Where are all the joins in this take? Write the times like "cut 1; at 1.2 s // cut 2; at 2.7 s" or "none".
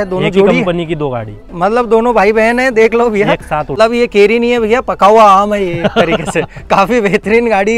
cut 1; at 3.7 s